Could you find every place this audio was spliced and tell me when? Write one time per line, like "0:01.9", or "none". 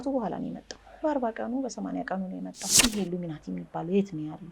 0:02.6